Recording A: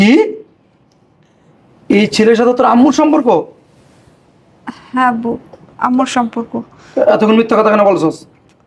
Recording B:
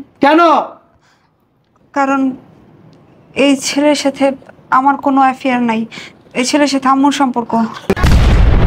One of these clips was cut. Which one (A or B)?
B